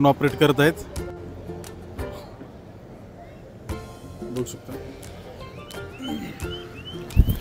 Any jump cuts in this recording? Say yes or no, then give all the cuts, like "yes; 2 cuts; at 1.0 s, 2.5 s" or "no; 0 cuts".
no; 0 cuts